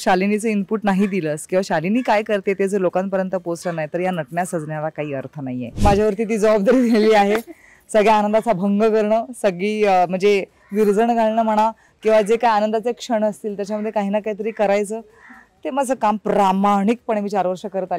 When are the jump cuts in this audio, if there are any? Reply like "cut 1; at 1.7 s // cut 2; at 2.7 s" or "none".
cut 1; at 5.8 s